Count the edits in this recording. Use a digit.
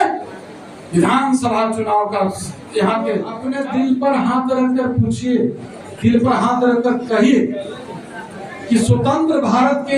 1